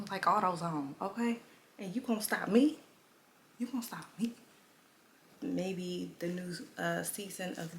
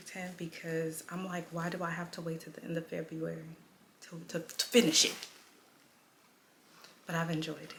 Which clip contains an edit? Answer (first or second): first